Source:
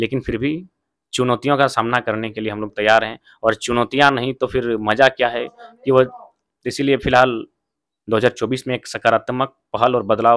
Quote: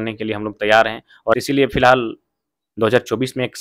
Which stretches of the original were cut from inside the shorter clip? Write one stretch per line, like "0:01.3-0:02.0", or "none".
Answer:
0:03.6-0:06.7